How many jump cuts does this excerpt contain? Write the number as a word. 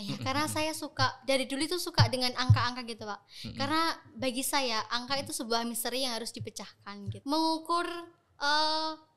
one